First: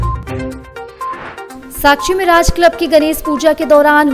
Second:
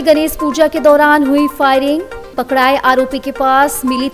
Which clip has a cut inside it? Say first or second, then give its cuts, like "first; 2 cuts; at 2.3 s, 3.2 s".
first; 1 cut; at 1.2 s